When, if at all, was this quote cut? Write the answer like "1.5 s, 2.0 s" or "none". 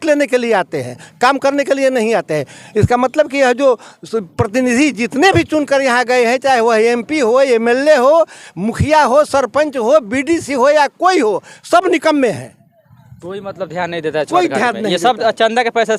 none